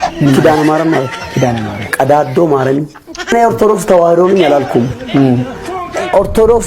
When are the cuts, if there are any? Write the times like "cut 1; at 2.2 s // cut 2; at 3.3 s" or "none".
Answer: cut 1; at 3.3 s